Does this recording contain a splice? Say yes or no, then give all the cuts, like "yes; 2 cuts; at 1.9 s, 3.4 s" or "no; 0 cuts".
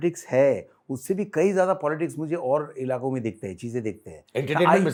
no; 0 cuts